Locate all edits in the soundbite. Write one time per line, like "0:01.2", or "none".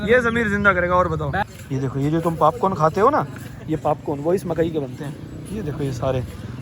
0:01.5

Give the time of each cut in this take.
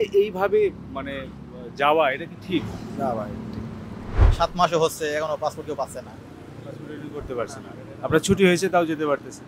0:04.1

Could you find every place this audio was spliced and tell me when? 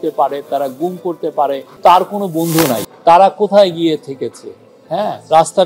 0:01.7
0:02.8

